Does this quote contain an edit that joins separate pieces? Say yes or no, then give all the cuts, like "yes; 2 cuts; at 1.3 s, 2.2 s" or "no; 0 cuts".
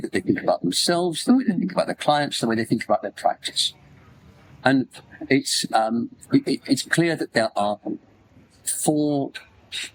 no; 0 cuts